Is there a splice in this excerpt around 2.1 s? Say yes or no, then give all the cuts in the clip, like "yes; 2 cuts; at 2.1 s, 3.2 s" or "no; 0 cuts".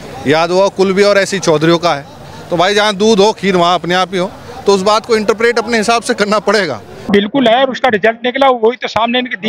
no; 1 cut; at 7.1 s